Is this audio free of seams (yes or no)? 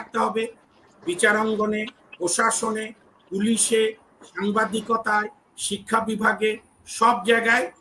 yes